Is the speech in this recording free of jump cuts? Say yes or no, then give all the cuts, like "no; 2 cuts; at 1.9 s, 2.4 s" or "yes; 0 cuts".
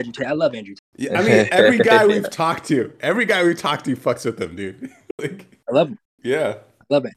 yes; 0 cuts